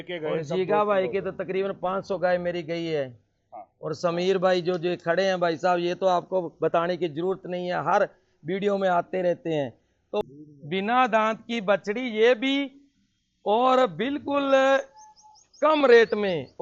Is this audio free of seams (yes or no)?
no